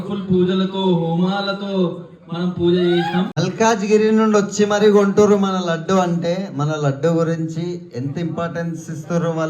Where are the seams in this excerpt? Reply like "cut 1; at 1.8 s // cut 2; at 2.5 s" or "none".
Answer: cut 1; at 3.4 s